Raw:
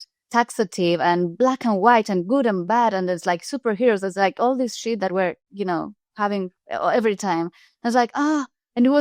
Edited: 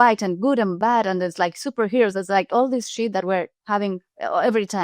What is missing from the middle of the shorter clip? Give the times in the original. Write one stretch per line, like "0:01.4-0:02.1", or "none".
0:05.4-0:06.1

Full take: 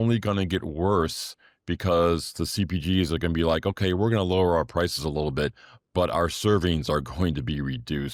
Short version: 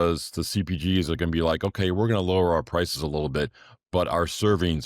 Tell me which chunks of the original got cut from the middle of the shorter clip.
none

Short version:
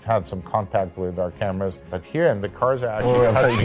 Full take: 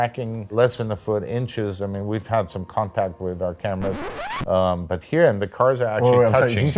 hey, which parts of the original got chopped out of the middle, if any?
0:04.1-0:04.8

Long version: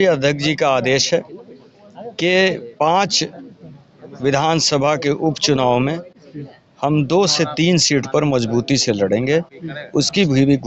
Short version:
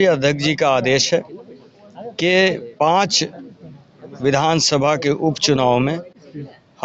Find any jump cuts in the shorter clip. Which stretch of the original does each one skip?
none

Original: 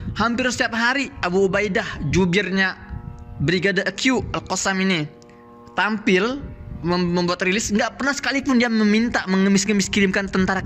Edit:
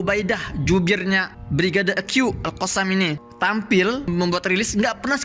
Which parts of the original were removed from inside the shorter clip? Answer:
0:02.8-0:03.3
0:05.1-0:05.6
0:06.4-0:07.0

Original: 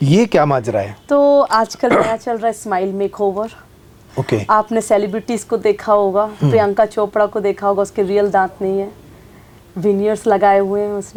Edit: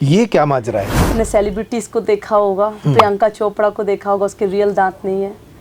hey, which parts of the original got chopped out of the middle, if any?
0:01.1-0:04.7

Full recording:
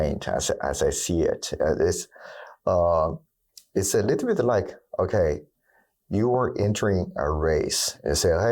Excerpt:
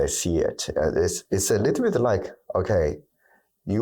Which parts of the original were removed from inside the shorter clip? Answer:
0:02.0-0:03.6

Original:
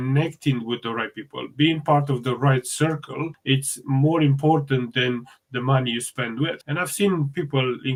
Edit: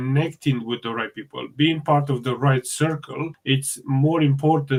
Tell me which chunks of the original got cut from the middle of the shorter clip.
none

